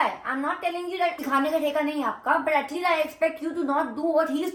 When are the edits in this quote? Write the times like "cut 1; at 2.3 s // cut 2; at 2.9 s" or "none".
none